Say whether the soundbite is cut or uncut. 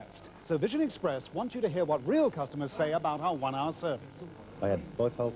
cut